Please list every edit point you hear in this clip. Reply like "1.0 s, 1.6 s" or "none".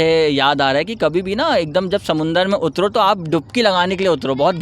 none